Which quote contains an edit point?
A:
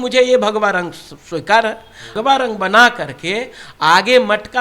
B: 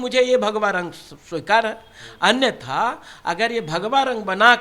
A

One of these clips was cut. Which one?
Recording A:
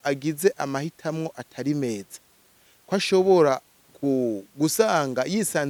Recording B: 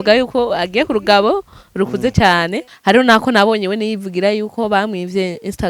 B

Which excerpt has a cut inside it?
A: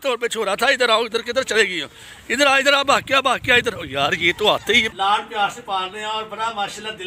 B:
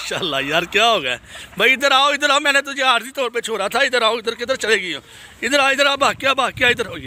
A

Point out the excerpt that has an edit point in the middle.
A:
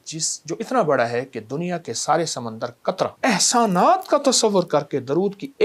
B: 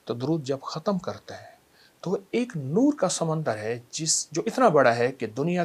A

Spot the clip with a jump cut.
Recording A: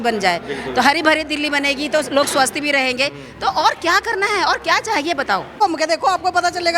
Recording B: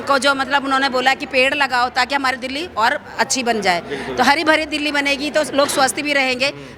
A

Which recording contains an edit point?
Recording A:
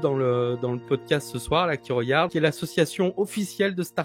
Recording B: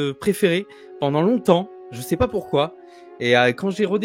A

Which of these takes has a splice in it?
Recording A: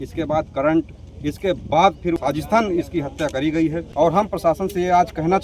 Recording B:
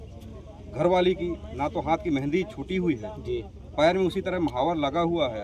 A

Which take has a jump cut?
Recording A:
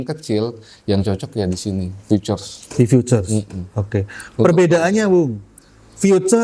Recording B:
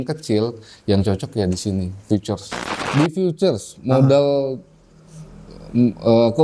B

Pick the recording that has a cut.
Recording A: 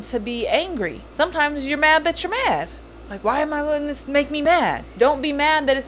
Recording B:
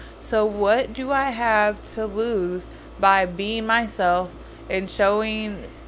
A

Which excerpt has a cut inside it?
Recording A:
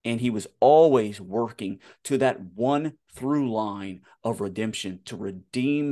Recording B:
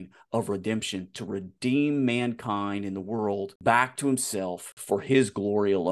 B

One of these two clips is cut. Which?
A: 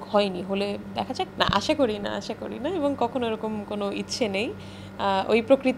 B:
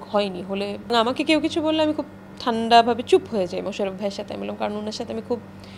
B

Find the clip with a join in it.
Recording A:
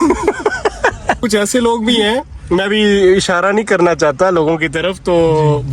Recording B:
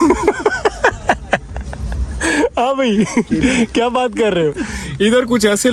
A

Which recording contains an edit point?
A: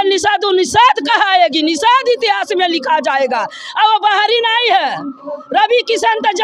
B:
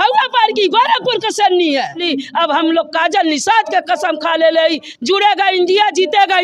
B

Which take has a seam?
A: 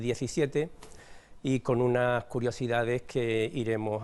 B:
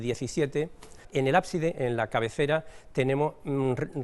B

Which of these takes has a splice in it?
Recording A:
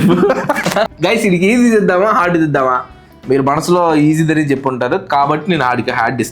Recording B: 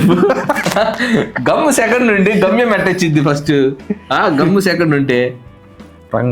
A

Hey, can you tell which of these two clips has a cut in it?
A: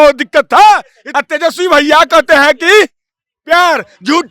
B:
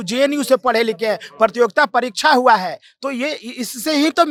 A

